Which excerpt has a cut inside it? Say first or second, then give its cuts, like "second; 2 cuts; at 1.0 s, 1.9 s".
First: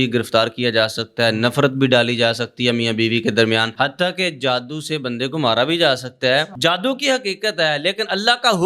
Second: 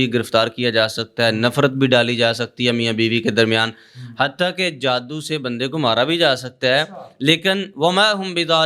first; 2 cuts; at 3.7 s, 6.5 s